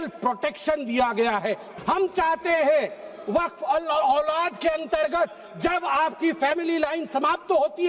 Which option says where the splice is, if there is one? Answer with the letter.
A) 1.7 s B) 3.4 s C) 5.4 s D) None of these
A